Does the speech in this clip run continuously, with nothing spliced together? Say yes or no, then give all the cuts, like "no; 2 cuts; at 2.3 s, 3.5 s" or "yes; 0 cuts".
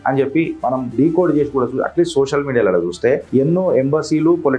no; 2 cuts; at 0.9 s, 3.2 s